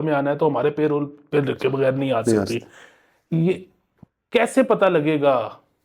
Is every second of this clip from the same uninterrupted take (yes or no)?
yes